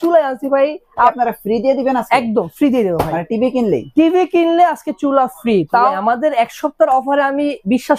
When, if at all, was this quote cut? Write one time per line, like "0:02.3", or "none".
0:01.1
0:05.9